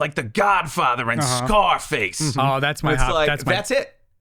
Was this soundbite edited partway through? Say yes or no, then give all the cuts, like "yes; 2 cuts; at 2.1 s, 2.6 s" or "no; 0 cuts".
no; 0 cuts